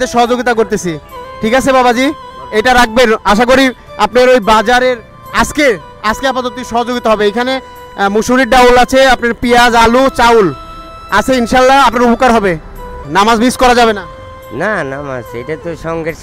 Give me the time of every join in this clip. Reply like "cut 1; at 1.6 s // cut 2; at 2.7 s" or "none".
cut 1; at 13.0 s